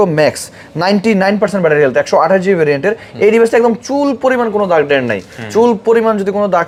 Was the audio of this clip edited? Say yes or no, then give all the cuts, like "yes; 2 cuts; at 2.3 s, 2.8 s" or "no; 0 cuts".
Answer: no; 0 cuts